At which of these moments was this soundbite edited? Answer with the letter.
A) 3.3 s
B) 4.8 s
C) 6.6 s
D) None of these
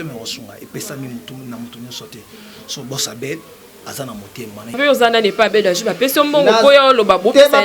B